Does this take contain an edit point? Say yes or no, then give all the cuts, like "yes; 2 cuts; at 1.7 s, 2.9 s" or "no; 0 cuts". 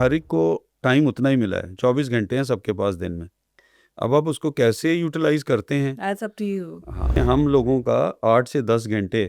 yes; 1 cut; at 7.2 s